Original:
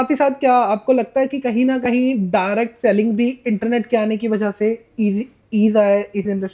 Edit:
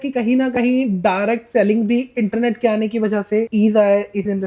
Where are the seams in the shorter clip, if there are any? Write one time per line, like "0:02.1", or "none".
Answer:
0:03.5

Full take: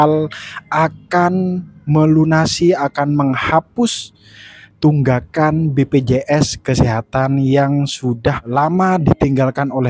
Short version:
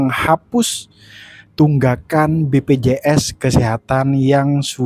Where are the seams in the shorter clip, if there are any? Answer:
none

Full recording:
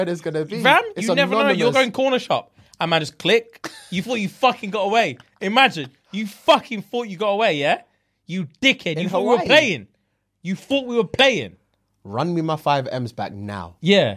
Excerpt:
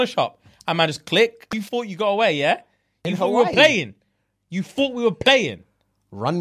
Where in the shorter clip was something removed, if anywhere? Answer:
0:01.6
0:03.0

